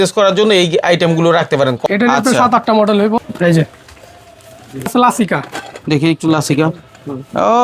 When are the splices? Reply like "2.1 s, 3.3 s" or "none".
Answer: 1.8 s, 3.2 s, 4.9 s